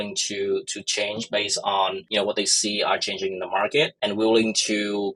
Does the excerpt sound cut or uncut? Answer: cut